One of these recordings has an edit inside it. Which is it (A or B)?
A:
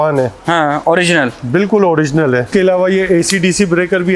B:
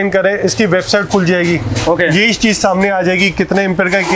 A